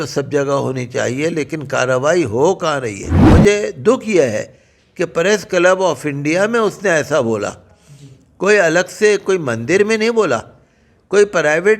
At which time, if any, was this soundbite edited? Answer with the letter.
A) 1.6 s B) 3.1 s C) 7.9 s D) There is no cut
B